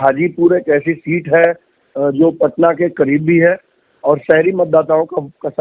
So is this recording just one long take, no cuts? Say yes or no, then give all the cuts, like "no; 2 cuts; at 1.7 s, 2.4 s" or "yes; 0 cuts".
yes; 0 cuts